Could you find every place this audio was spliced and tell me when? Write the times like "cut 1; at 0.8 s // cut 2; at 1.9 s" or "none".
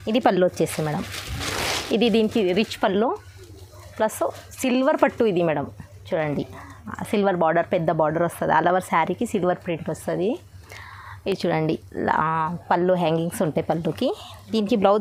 none